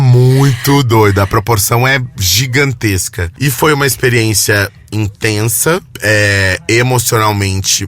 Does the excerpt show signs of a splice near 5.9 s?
yes; 2 cuts; at 3.2 s, 5.9 s

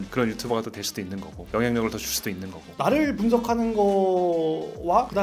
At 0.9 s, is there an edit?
no; 1 cut; at 2.8 s

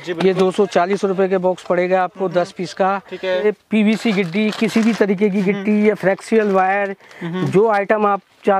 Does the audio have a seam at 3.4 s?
yes; 1 cut; at 3.4 s

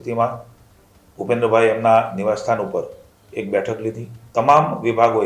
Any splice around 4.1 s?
yes; 1 cut; at 4.1 s

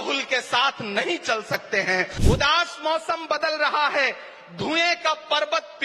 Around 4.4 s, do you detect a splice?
no; 1 cut; at 2.1 s

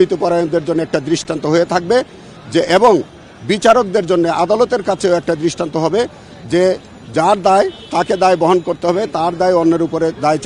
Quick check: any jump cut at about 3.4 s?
no; 0 cuts

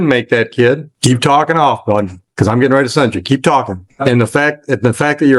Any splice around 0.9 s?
yes; 2 cuts; at 0.9 s, 3.8 s

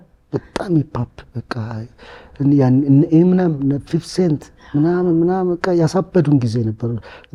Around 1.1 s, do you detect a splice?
no; 0 cuts

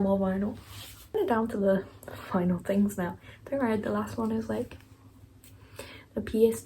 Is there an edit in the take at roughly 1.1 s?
yes; 1 cut; at 1.1 s

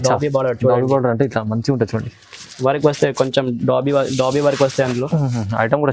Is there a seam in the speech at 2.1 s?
no; 0 cuts

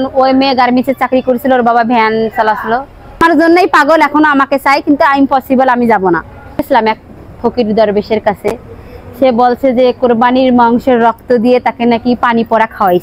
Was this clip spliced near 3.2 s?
yes; 2 cuts; at 3.2 s, 6.6 s

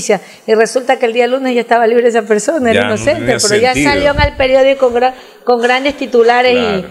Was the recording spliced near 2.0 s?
no; 0 cuts

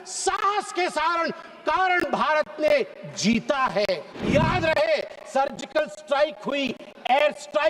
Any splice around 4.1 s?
yes; 1 cut; at 4.1 s

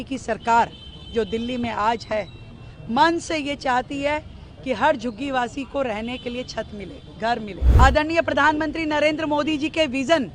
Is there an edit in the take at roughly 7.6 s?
yes; 1 cut; at 7.6 s

